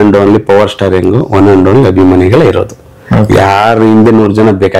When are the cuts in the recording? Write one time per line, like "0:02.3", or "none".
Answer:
none